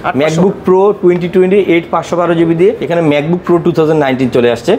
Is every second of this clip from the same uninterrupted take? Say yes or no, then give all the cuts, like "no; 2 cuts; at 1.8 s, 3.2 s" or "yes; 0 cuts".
no; 1 cut; at 2.8 s